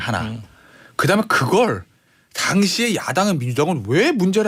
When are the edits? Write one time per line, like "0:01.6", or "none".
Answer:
none